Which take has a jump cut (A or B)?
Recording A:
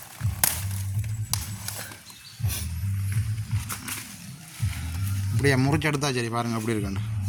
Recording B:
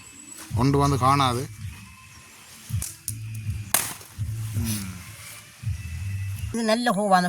B